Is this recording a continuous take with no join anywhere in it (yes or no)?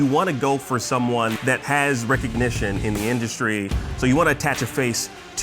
no